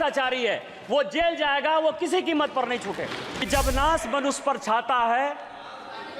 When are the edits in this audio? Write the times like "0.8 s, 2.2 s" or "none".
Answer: 3.4 s